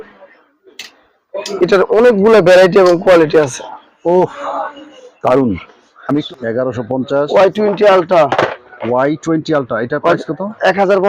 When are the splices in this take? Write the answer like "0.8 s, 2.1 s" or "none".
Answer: 6.2 s